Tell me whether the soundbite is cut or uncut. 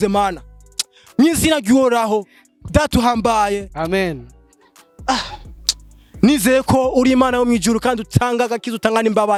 uncut